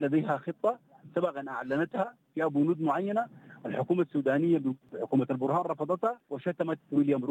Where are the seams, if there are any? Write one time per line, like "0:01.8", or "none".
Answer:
0:04.9
0:06.3